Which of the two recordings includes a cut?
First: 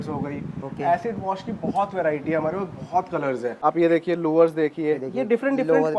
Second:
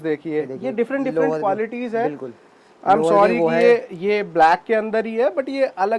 first; 1 cut; at 3.6 s

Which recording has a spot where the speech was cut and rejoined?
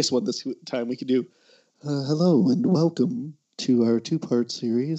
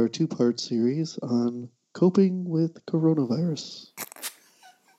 second; 1 cut; at 3.8 s

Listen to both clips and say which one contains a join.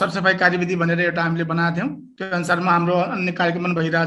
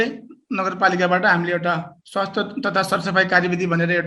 second; 1 cut; at 2.0 s

